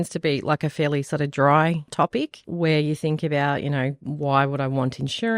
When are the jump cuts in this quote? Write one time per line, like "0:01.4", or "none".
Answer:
0:01.9